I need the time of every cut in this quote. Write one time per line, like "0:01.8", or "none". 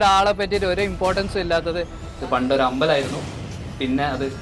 0:02.0